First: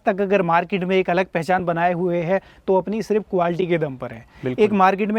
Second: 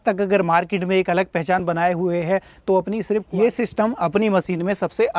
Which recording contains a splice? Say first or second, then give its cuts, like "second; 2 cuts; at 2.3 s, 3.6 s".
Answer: second; 1 cut; at 3.3 s